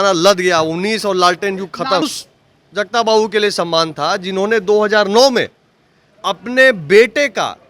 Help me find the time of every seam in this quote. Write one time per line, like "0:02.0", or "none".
0:02.0